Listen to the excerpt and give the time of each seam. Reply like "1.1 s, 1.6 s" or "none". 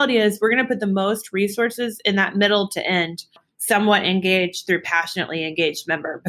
3.5 s